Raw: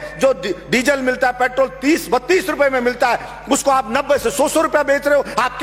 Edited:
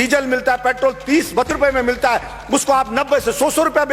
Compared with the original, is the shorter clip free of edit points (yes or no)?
no